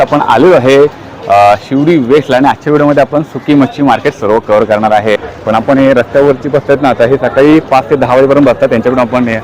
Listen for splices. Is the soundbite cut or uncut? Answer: cut